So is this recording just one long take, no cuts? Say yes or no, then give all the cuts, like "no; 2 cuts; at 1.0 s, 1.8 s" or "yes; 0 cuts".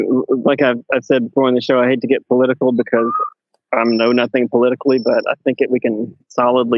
yes; 0 cuts